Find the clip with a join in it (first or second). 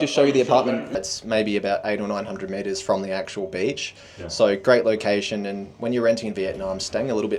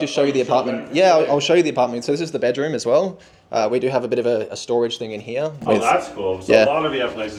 first